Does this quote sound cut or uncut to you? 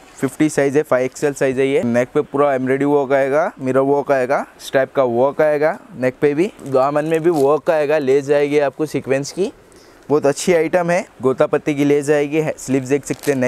cut